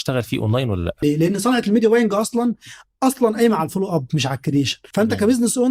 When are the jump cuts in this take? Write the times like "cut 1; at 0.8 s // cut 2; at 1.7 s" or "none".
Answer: cut 1; at 1.0 s // cut 2; at 4.8 s